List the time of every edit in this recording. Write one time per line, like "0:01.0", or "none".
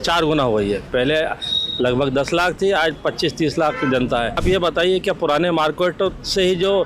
0:04.4